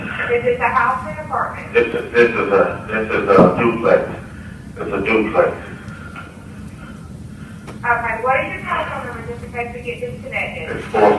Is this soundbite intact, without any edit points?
yes; 0 cuts

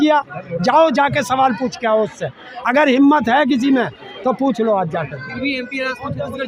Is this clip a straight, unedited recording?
yes; 0 cuts

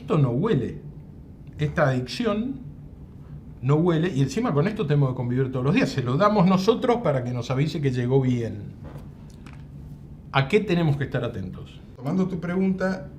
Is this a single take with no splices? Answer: no; 1 cut; at 12.0 s

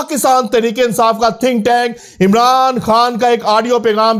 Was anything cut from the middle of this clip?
no; 0 cuts

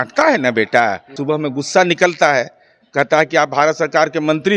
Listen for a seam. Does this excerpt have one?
yes; 1 cut; at 1.1 s

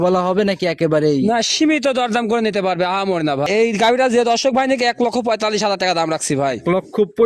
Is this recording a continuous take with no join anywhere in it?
no; 1 cut; at 3.5 s

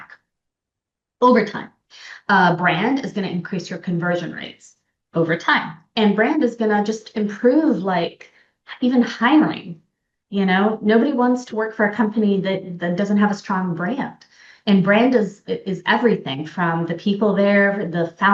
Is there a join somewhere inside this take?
no; 0 cuts

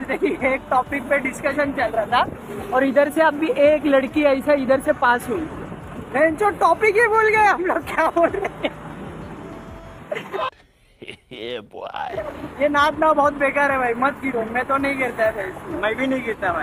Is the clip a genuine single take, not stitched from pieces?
yes; 0 cuts

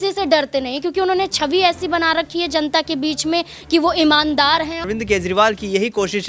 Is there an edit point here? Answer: yes; 1 cut; at 4.8 s

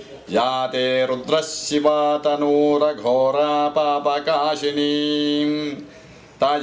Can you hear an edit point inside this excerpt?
no; 0 cuts

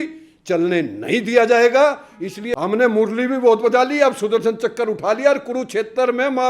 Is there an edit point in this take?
yes; 1 cut; at 2.3 s

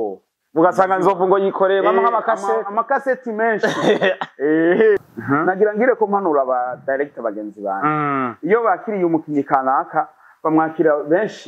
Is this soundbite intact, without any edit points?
no; 1 cut; at 5.0 s

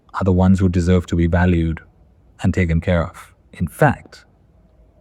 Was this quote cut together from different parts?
no; 0 cuts

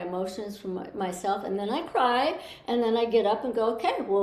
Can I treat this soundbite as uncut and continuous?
yes; 0 cuts

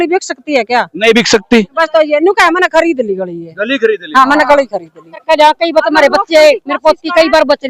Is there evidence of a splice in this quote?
yes; 1 cut; at 5.2 s

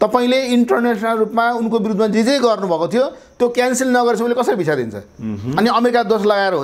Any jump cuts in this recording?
no; 0 cuts

